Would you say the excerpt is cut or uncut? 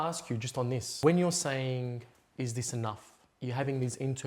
cut